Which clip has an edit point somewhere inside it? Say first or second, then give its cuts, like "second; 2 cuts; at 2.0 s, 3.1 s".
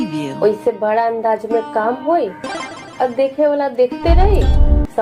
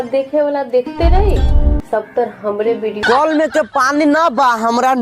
second; 1 cut; at 3.0 s